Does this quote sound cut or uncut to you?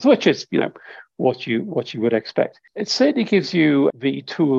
cut